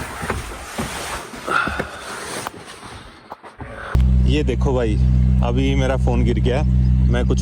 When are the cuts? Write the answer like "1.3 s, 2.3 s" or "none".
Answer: 3.8 s

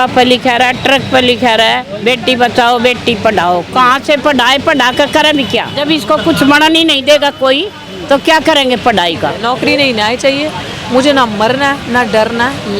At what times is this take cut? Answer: 5.7 s, 9.4 s

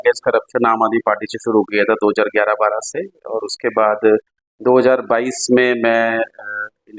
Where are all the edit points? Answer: none

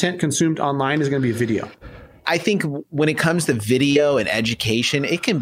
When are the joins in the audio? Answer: 2.1 s

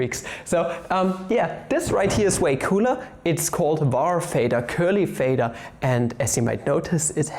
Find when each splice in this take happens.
none

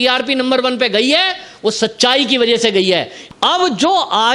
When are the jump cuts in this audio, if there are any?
3.2 s

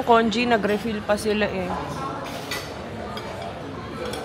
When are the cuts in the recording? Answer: none

